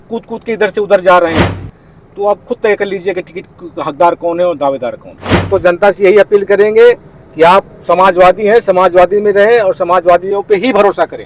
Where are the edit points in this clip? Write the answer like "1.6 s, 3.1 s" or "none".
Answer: 5.4 s